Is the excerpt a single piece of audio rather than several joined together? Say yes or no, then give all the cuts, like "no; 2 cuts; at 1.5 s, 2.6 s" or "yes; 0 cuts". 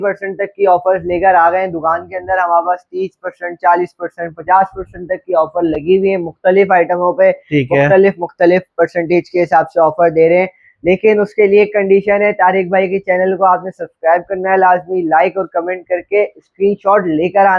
yes; 0 cuts